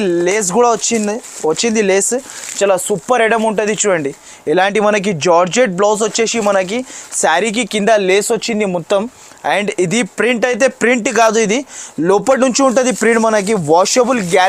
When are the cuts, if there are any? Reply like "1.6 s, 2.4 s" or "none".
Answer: none